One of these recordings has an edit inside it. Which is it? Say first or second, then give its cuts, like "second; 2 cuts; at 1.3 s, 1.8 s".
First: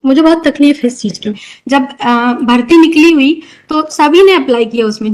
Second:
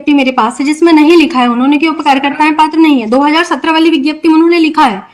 first; 1 cut; at 1.5 s